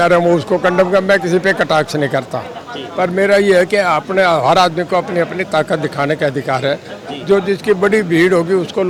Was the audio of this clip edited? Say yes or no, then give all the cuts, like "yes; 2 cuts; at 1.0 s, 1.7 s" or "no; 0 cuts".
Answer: no; 0 cuts